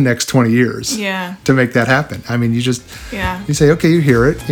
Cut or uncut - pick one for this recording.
uncut